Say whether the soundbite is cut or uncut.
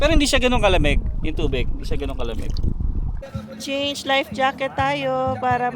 cut